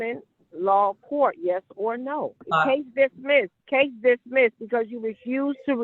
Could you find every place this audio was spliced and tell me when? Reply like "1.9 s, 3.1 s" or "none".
2.4 s, 3.6 s